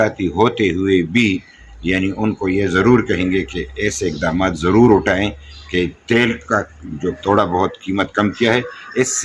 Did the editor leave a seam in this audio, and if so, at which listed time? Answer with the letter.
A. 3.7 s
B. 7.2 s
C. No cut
B